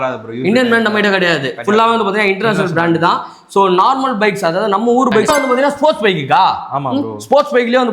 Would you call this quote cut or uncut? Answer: cut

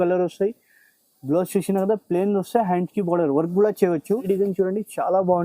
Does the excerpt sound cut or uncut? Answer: cut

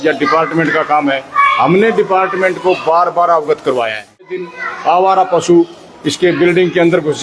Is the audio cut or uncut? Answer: cut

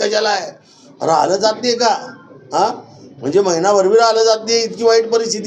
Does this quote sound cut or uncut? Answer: uncut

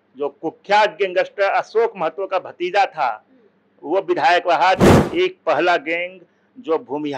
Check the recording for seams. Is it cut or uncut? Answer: cut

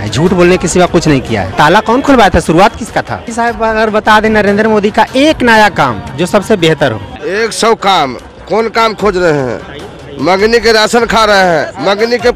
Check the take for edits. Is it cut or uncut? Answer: cut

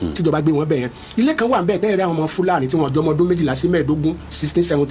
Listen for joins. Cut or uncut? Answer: uncut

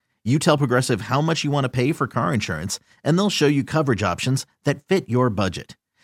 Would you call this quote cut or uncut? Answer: uncut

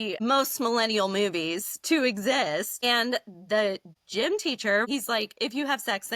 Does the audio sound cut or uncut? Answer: cut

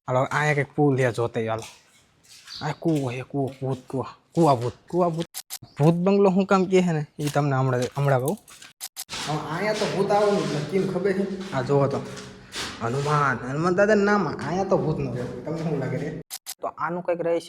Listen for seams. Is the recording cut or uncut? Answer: cut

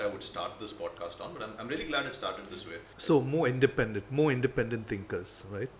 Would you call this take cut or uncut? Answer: cut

